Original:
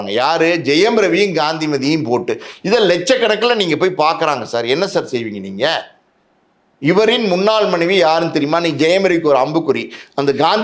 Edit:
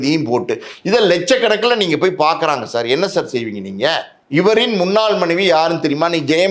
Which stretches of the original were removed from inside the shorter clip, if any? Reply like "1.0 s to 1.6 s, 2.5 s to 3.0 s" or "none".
5.9 s to 6.7 s

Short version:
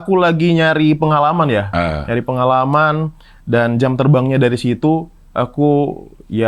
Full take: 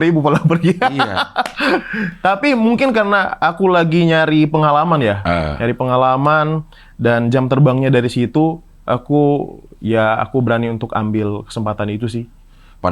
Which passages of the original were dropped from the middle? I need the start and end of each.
none

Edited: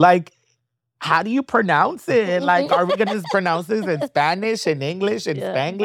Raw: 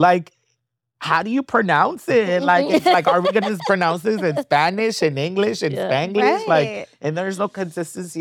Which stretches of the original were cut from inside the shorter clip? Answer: 2.7 s to 3.0 s

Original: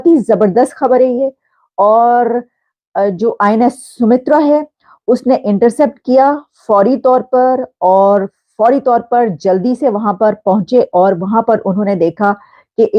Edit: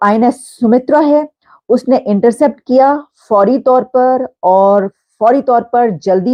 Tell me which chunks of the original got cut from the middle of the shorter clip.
none

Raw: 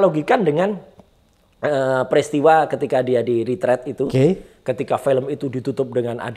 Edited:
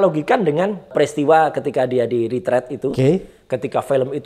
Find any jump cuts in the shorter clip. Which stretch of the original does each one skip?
0.9 s to 2.1 s

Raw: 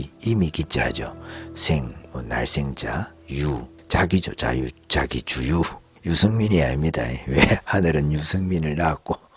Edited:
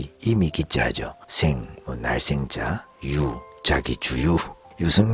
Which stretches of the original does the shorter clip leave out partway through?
1.2 s to 1.5 s, 3.8 s to 4.8 s

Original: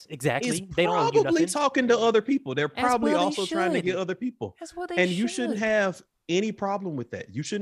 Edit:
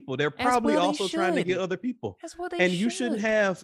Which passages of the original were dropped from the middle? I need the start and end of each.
none

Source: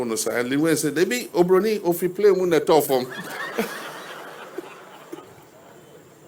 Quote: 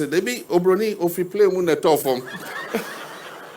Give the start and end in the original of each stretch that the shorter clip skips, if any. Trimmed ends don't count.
none

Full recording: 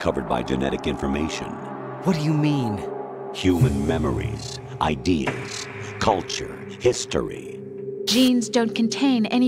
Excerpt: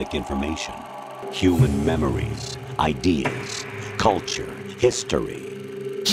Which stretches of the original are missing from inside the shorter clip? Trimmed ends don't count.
1.8 s to 3.1 s

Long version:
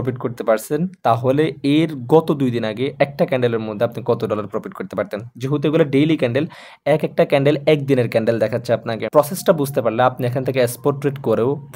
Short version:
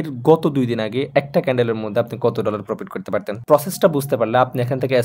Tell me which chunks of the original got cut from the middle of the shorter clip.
5.2 s to 9.0 s

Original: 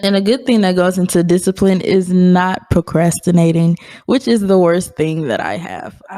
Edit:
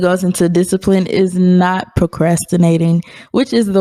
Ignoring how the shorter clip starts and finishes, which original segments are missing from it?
none

